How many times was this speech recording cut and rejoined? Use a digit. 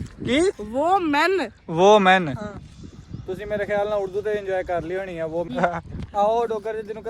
1